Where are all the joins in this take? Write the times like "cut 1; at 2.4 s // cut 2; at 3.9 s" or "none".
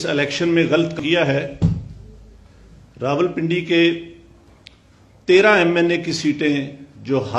cut 1; at 1.0 s